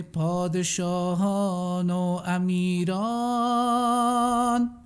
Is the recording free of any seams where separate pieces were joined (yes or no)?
yes